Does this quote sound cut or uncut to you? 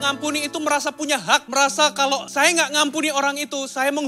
cut